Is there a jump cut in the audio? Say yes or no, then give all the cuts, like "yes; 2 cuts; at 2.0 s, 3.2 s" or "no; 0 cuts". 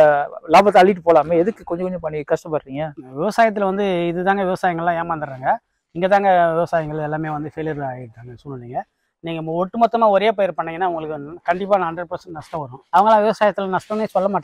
yes; 1 cut; at 12.8 s